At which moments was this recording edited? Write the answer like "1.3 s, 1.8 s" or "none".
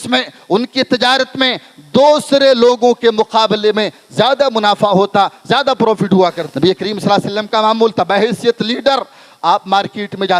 6.4 s